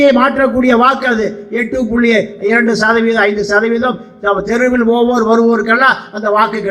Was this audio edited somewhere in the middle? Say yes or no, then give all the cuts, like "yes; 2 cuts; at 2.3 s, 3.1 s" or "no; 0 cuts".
no; 0 cuts